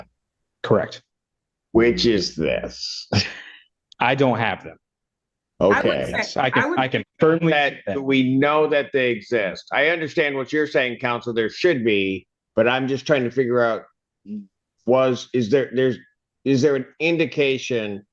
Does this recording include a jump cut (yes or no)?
no